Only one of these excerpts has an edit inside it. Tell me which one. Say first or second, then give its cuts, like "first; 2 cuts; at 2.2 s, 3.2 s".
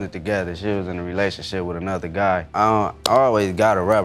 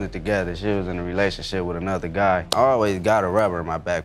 second; 1 cut; at 2.5 s